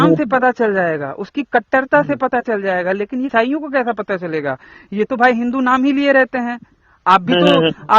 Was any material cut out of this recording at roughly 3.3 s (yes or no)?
yes